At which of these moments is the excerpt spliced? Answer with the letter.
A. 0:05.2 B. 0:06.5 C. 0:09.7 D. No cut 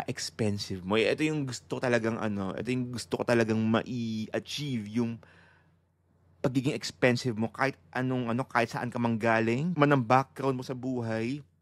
C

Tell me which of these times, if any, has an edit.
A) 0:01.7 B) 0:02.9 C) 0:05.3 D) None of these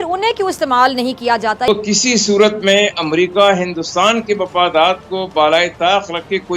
A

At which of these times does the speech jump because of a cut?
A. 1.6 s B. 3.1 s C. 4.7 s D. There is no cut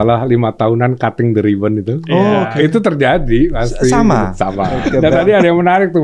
C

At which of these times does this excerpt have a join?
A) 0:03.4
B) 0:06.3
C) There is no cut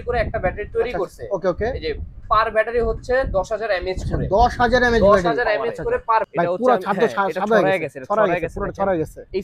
B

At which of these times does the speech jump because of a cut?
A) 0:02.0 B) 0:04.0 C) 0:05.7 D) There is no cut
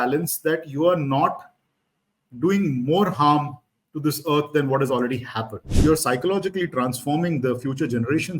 C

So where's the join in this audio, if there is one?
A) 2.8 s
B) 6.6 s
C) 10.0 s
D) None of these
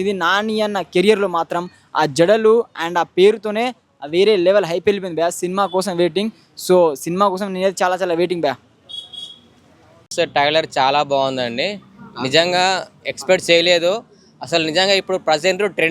C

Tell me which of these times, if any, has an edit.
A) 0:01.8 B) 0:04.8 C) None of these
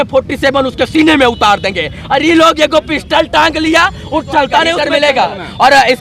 B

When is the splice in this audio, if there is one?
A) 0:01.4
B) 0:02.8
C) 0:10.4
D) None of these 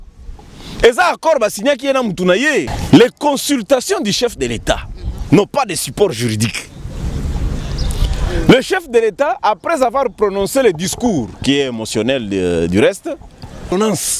B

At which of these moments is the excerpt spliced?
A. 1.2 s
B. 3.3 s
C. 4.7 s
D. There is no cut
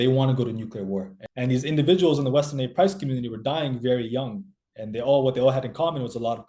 A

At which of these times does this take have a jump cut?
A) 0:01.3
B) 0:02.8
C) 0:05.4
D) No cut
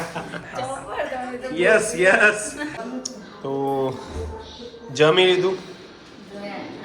B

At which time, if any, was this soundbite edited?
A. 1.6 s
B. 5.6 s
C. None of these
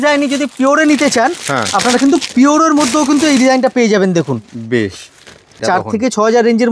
B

